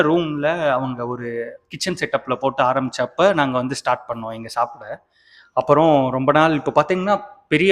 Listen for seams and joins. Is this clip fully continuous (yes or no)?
yes